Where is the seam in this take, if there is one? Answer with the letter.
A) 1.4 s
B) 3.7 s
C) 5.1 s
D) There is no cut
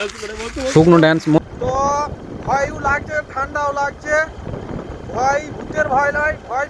A